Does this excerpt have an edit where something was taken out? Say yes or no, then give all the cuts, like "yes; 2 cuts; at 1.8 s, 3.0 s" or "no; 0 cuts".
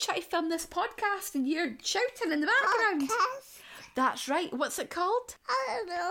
no; 0 cuts